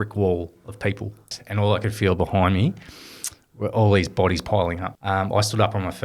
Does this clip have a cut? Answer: yes; 2 cuts; at 1.3 s, 4.9 s

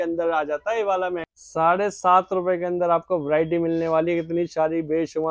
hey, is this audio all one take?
no; 1 cut; at 1.2 s

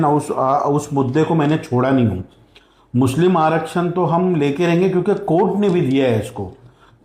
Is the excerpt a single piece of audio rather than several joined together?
yes; 0 cuts

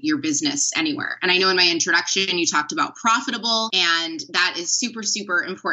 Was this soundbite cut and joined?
yes; 1 cut; at 3.7 s

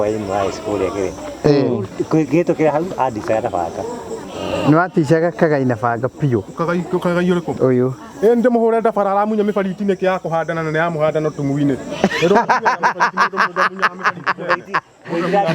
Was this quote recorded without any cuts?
no; 1 cut; at 4.3 s

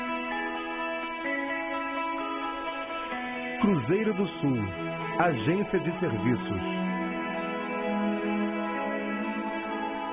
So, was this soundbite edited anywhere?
no; 0 cuts

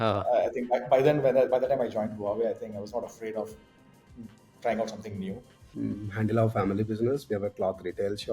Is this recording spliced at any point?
yes; 1 cut; at 5.6 s

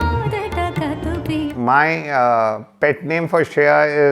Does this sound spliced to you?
yes; 1 cut; at 1.5 s

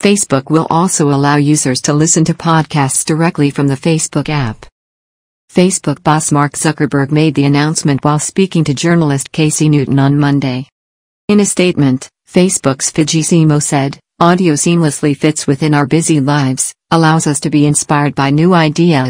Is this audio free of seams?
no; 1 cut; at 0.9 s

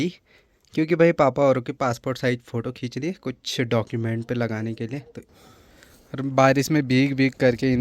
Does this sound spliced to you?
yes; 1 cut; at 5.1 s

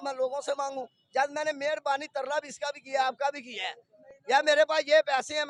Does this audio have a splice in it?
no; 0 cuts

